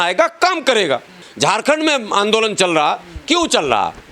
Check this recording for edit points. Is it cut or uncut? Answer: cut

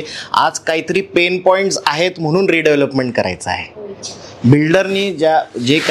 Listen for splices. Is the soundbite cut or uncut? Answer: cut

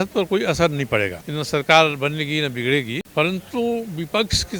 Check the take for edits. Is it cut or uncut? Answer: cut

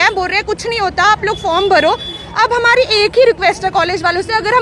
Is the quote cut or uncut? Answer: uncut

